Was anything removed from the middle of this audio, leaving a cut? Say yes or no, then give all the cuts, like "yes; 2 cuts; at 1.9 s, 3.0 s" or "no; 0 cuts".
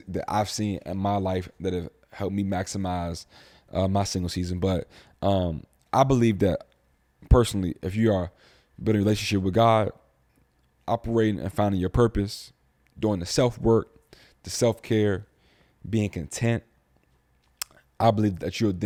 no; 0 cuts